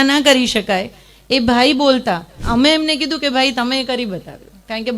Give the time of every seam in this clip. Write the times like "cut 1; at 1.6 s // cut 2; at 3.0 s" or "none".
cut 1; at 2.4 s